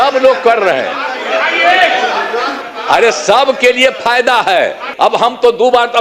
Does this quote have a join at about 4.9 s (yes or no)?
yes